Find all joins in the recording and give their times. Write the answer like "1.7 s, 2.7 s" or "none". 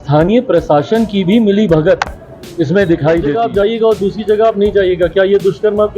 3.4 s